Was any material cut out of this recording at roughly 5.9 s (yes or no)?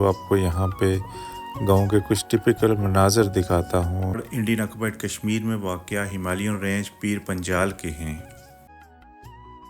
no